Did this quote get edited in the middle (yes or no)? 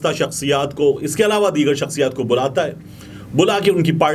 no